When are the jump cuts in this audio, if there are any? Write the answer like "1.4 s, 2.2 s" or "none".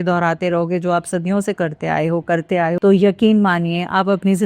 2.8 s